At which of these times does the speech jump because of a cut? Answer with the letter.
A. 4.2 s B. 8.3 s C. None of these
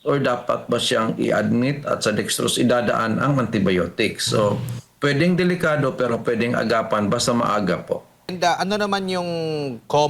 B